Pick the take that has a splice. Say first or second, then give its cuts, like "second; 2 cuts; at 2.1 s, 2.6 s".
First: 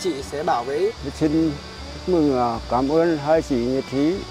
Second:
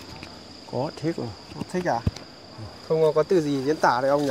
first; 1 cut; at 1.0 s